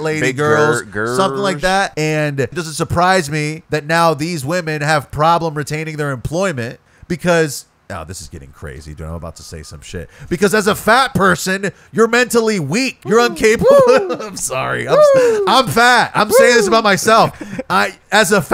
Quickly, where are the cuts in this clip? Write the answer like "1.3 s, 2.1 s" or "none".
1.9 s, 2.6 s, 3.6 s, 6.9 s, 13.0 s